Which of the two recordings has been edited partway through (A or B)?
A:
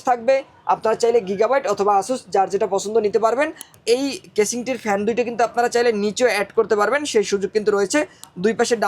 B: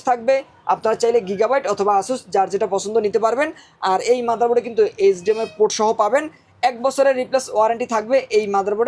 A